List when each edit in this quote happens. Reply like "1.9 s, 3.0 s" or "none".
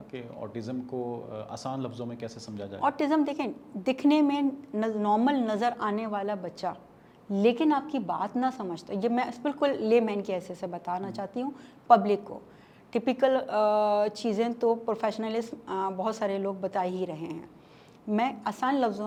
none

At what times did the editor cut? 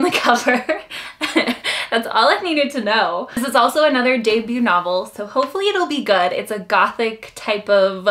none

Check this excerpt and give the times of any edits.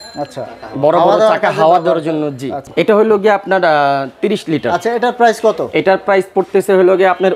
none

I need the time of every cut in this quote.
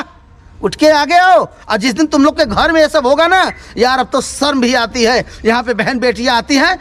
none

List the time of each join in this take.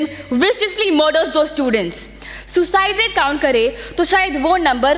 none

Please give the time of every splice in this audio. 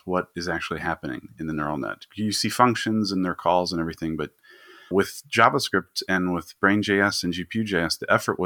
4.9 s

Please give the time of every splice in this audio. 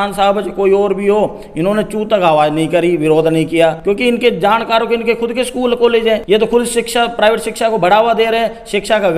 3.8 s, 6.2 s

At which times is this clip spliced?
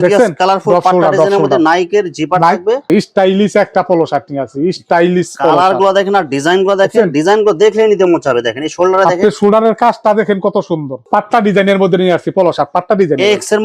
2.8 s, 11.0 s

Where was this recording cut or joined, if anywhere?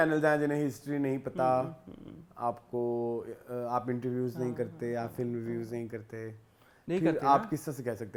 none

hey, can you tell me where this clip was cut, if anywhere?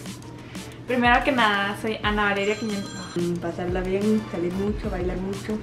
3.0 s

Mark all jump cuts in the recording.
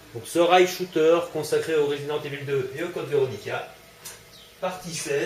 none

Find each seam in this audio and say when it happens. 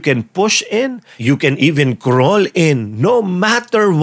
1.1 s

